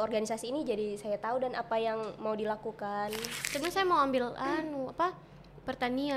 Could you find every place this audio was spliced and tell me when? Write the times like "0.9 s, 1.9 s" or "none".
3.3 s